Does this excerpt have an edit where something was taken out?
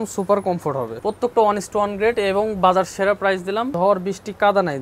yes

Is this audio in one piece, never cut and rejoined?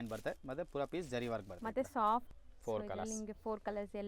no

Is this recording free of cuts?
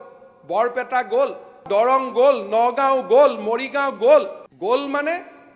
no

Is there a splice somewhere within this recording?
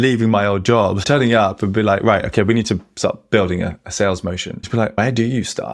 yes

